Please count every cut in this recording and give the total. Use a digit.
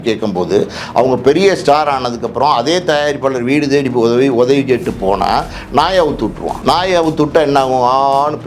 1